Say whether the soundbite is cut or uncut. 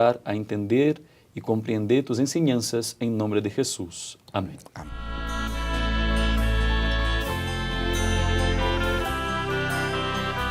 cut